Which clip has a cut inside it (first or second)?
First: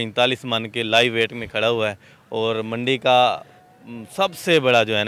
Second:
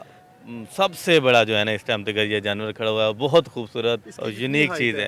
second